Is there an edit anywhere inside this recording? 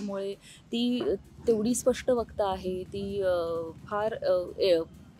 no; 0 cuts

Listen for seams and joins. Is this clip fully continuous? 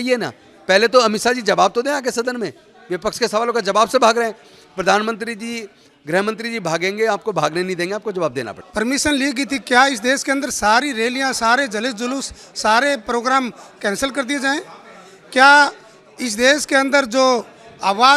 yes; 0 cuts

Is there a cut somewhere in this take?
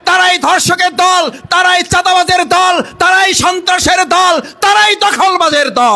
no; 0 cuts

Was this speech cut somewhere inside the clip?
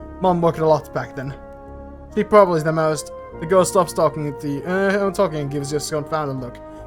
no; 0 cuts

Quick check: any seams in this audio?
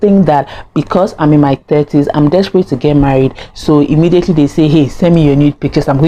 no; 0 cuts

